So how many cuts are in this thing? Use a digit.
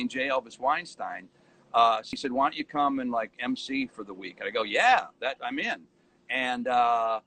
1